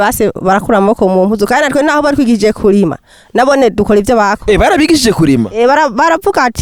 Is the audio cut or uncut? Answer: uncut